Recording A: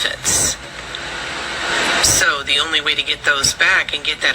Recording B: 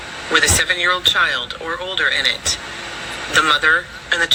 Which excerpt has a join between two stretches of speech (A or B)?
A